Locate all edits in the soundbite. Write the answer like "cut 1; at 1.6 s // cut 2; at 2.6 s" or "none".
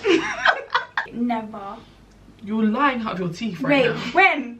cut 1; at 1.1 s